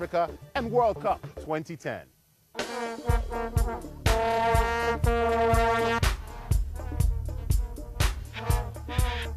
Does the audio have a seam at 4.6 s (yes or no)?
yes